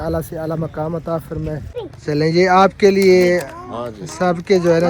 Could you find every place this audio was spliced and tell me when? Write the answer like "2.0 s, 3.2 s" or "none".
1.7 s